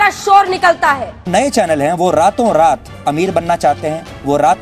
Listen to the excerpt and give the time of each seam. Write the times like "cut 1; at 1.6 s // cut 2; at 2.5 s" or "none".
cut 1; at 1.3 s